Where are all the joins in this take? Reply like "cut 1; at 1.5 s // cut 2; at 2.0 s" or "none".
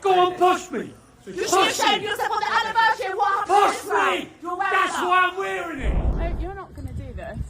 cut 1; at 6.2 s